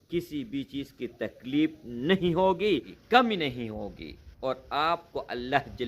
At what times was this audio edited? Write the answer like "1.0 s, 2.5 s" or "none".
2.9 s